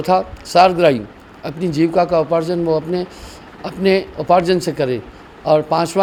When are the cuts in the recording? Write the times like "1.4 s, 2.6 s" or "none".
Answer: none

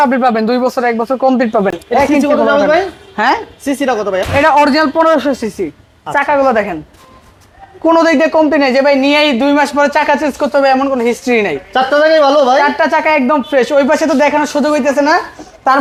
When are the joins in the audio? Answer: none

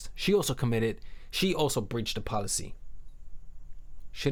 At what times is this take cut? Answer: none

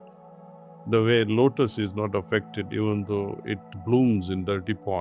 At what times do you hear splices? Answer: 3.7 s

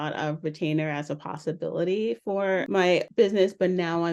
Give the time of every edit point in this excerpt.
2.8 s

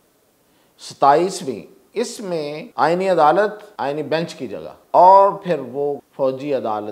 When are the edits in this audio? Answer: 2.6 s, 3.6 s, 4.7 s, 6.0 s

